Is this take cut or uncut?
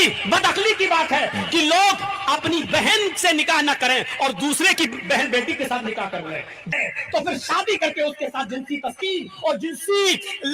cut